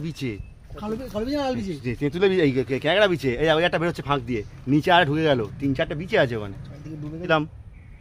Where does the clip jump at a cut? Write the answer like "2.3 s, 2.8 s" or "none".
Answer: none